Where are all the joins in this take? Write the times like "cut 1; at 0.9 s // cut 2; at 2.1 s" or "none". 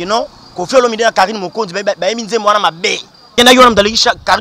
cut 1; at 3.4 s